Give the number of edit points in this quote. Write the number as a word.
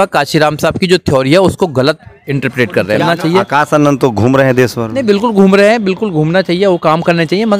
one